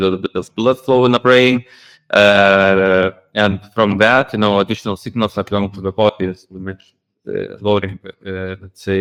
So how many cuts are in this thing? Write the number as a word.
zero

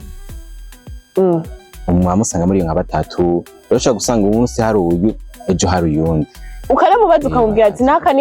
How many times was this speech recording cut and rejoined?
zero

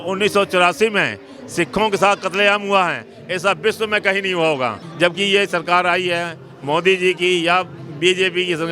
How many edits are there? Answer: one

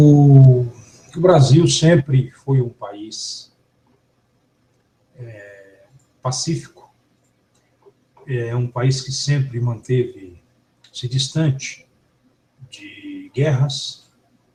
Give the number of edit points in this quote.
zero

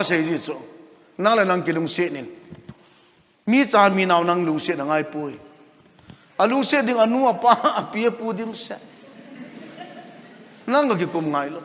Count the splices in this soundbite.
zero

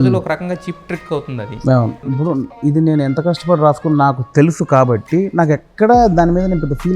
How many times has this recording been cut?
one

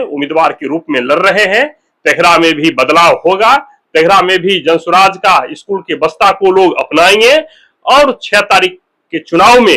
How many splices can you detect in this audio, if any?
zero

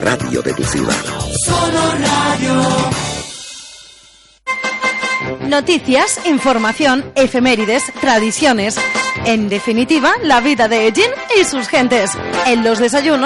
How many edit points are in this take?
one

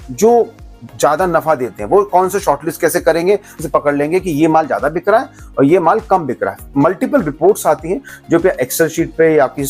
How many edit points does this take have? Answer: one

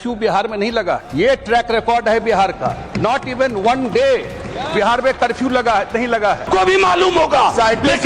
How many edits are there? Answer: two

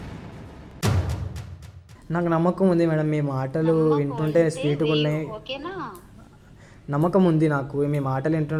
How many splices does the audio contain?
one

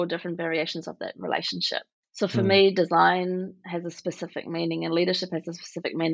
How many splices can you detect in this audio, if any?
one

